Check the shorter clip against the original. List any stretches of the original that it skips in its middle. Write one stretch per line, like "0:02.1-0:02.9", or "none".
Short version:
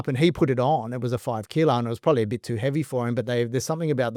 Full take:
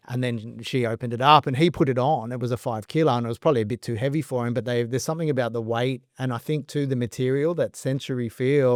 none